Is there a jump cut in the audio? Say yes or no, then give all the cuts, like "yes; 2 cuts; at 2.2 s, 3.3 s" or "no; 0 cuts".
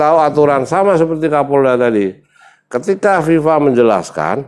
no; 0 cuts